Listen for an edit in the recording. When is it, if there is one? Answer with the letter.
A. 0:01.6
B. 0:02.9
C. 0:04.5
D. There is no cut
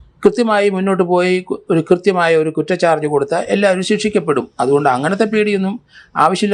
D